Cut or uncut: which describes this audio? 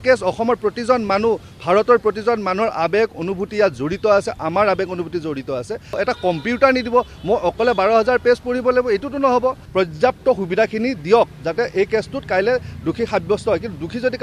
cut